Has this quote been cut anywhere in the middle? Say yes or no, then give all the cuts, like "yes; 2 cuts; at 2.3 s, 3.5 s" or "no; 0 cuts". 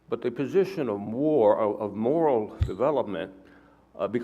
yes; 1 cut; at 2.8 s